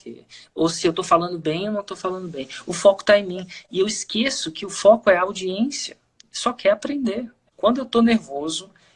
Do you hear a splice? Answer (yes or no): yes